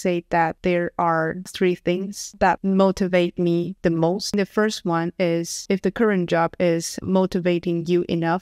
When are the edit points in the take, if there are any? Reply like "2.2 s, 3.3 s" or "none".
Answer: 4.3 s, 6.9 s